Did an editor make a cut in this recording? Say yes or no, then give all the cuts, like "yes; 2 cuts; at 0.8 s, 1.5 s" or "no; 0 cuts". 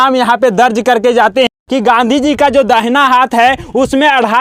yes; 1 cut; at 1.5 s